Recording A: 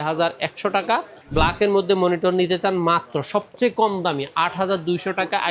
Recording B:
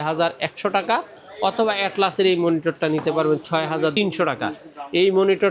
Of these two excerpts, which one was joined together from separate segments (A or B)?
A